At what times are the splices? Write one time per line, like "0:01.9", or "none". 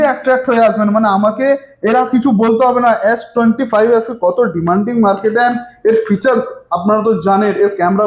none